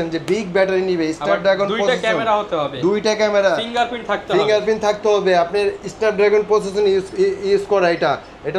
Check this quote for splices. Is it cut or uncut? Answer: uncut